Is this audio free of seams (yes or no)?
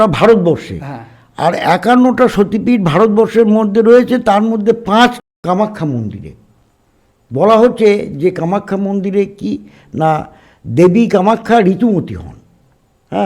no